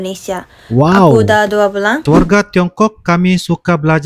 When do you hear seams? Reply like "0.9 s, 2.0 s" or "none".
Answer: 2.0 s

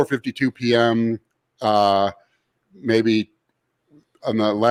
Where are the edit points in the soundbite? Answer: none

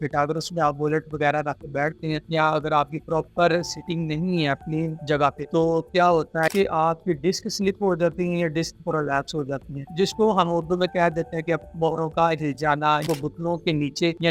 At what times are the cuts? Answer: 6.5 s, 13.0 s

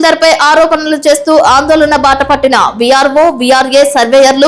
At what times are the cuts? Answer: none

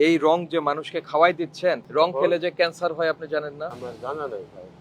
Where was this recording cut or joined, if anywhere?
3.7 s

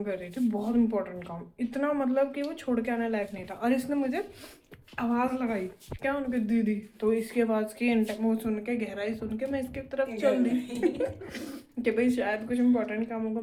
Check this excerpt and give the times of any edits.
none

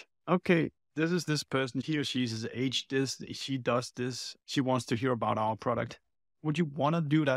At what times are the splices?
none

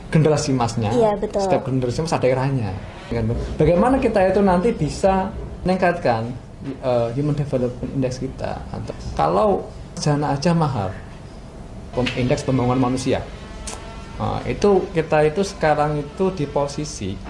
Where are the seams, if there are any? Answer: 3.1 s, 5.6 s, 8.8 s, 10.0 s, 11.9 s

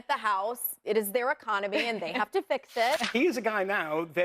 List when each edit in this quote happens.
3.0 s

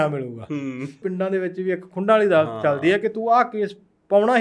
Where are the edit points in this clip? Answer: 1.0 s

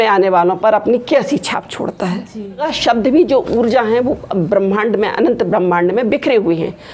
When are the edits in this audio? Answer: 2.7 s

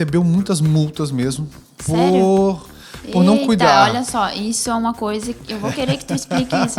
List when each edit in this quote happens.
none

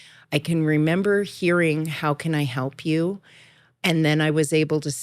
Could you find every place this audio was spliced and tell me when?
3.8 s

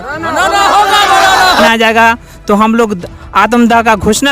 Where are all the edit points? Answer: 1.6 s

